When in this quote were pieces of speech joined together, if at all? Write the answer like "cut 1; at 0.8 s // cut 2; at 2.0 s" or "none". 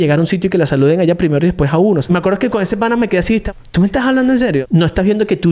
cut 1; at 2.0 s // cut 2; at 3.5 s // cut 3; at 4.6 s

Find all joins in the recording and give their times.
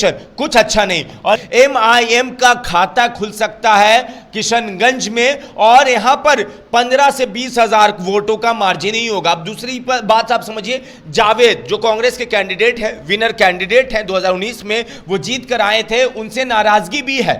cut 1; at 1.5 s

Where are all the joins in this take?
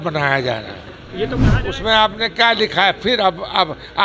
cut 1; at 1.5 s

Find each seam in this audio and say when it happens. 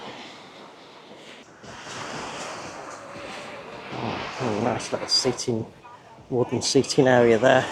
cut 1; at 1.4 s

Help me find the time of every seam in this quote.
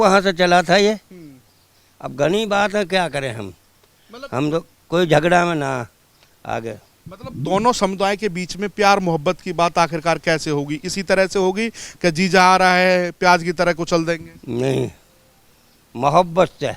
none

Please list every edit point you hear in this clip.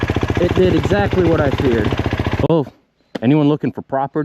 cut 1; at 2.5 s

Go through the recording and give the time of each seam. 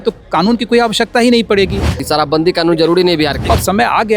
cut 1; at 1.9 s // cut 2; at 3.5 s

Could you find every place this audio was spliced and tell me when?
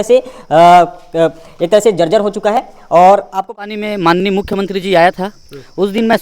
cut 1; at 3.5 s

